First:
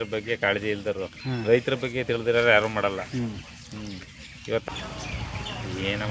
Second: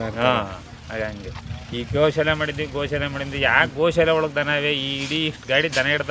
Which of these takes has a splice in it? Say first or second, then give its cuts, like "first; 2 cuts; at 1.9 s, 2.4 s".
first; 1 cut; at 4.6 s